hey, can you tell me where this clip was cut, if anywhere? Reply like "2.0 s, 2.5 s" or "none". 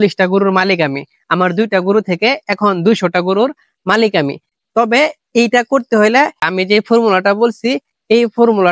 6.4 s